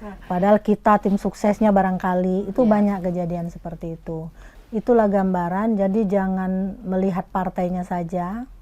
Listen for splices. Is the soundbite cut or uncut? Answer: cut